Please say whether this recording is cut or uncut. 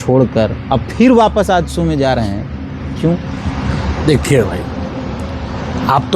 uncut